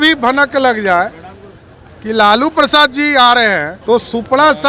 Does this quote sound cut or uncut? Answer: cut